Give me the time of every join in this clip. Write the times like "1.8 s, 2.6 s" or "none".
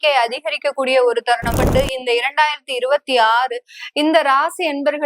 1.6 s